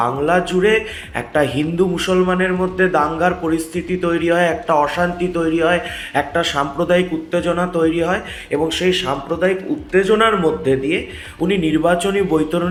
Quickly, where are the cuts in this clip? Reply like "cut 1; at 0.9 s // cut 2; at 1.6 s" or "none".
none